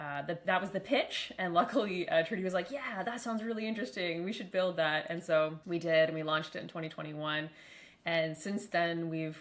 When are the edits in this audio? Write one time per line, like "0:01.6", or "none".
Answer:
none

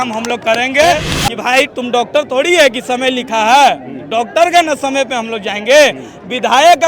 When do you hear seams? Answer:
0:01.1

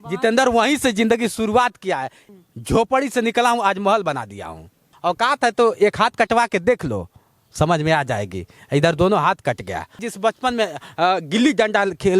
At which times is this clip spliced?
0:02.2
0:04.9
0:10.0

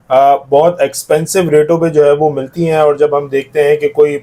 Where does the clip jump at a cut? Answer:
none

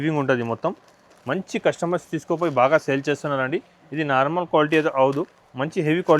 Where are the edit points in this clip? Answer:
none

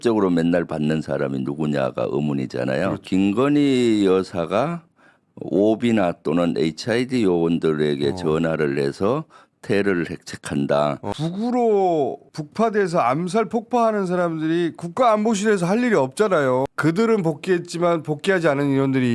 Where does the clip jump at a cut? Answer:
0:11.1
0:16.7

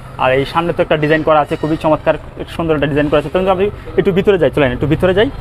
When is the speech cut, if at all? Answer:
none

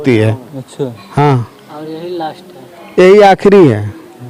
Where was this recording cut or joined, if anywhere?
none

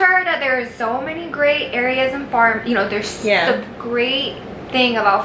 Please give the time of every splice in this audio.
none

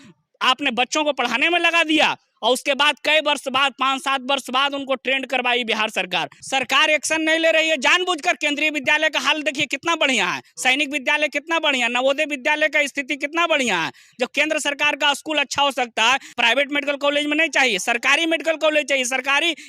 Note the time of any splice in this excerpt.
0:06.4
0:16.3

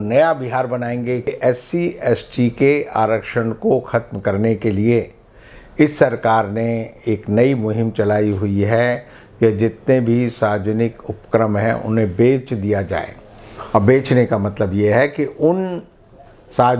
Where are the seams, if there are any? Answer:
0:01.3

